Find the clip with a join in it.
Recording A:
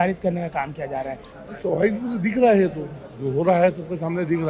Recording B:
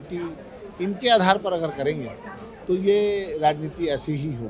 A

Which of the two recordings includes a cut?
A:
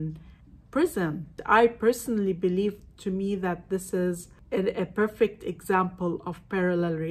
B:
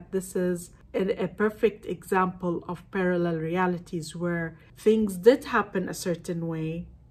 A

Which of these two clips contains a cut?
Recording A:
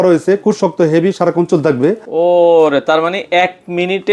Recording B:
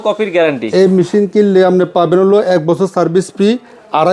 A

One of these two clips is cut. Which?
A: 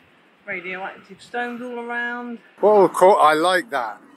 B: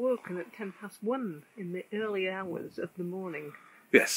A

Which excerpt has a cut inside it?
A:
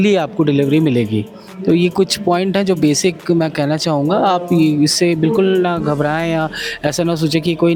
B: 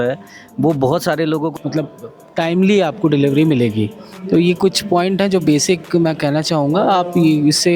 B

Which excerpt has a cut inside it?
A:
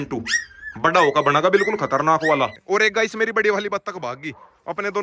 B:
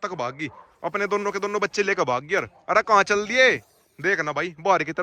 A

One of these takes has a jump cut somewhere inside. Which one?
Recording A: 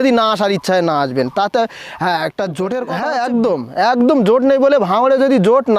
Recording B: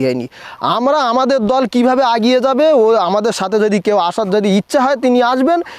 A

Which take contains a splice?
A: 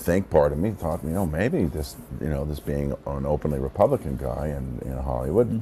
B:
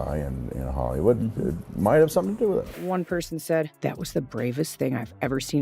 B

